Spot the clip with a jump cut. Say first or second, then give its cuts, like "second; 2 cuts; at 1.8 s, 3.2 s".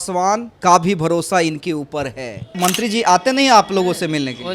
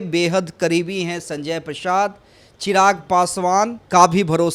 first; 1 cut; at 2.6 s